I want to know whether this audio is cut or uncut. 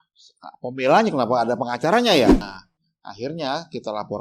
cut